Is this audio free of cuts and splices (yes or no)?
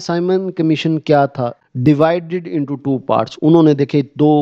no